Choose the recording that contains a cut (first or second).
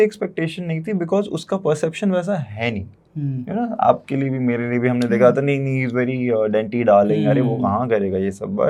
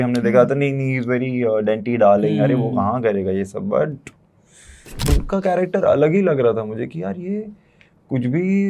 second